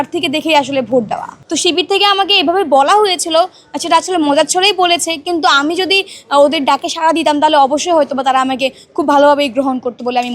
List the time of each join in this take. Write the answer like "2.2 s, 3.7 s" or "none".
1.3 s